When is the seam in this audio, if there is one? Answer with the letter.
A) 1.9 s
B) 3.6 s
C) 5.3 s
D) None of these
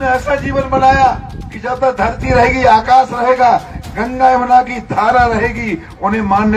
D